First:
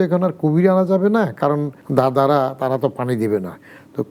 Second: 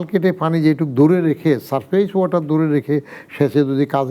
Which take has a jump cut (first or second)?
first